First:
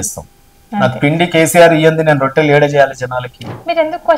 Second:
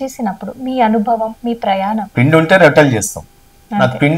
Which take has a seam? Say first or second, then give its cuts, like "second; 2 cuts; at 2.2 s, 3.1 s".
second; 1 cut; at 2.0 s